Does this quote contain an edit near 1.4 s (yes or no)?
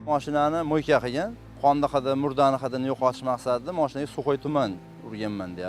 yes